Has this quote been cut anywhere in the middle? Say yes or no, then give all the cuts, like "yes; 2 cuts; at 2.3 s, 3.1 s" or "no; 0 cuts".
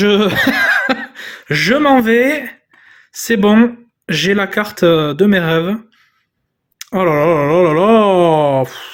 no; 0 cuts